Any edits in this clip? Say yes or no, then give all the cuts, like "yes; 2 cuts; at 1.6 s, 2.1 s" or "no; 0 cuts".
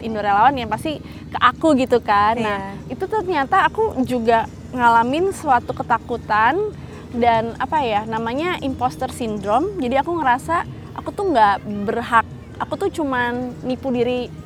no; 0 cuts